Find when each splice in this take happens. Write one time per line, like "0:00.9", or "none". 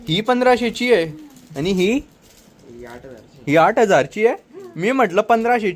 none